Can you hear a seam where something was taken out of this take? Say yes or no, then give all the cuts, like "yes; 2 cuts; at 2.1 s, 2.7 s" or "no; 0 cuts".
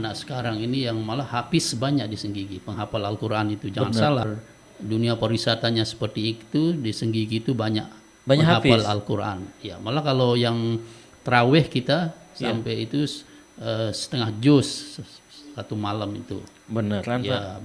no; 0 cuts